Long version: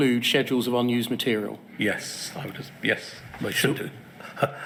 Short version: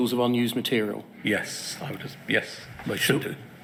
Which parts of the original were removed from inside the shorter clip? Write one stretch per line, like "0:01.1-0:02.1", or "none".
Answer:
none